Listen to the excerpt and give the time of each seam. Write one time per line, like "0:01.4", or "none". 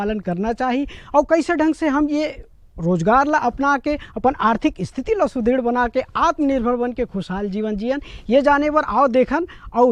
none